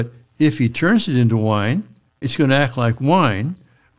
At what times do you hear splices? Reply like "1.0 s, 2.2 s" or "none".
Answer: 2.3 s